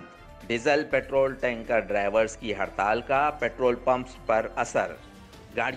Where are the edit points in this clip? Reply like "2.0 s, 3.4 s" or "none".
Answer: none